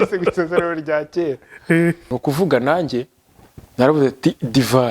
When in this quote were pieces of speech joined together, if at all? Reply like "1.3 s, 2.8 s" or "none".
2.1 s